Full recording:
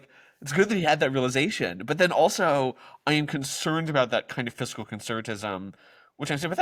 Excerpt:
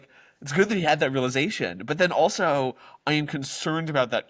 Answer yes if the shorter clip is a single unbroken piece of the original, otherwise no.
yes